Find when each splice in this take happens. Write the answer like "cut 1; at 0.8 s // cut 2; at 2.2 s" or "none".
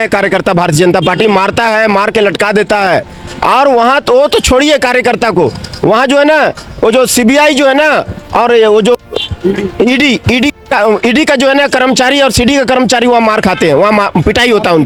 none